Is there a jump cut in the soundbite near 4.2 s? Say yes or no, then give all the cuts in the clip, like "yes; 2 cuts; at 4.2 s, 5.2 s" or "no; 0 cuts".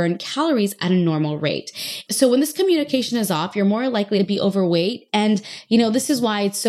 yes; 2 cuts; at 2.0 s, 4.2 s